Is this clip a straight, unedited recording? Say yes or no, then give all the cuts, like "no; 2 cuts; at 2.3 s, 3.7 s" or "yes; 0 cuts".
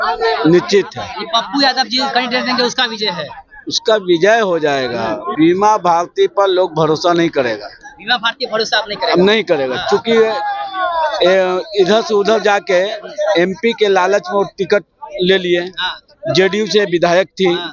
no; 1 cut; at 5.3 s